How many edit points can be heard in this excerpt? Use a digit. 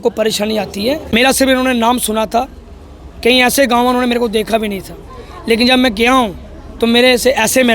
1